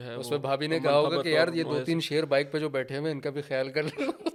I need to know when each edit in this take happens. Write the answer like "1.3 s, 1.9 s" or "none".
none

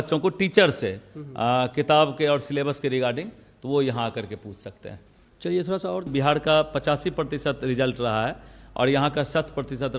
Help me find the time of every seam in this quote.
6.1 s

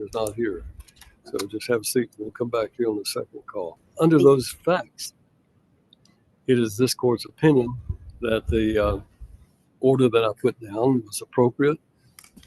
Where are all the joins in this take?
4.0 s

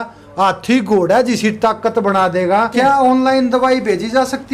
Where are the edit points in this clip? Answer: 2.7 s

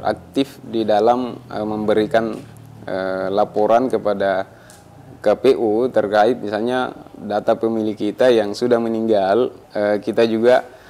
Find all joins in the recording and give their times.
9.6 s

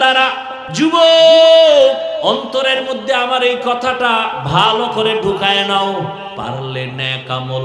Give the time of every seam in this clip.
0.8 s, 2.2 s, 6.3 s

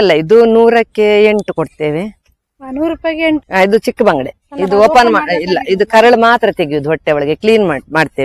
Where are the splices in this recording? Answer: 3.4 s

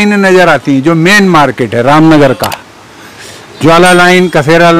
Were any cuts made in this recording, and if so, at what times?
none

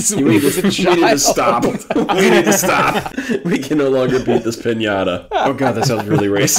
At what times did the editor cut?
3.1 s, 5.5 s

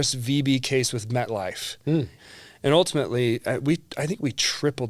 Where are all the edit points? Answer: 2.2 s

